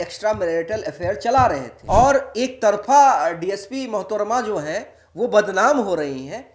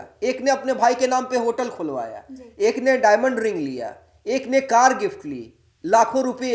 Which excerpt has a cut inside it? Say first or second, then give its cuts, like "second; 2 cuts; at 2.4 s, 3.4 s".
first; 1 cut; at 1.7 s